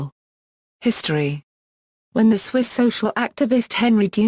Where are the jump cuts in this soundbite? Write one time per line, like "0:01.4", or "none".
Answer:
none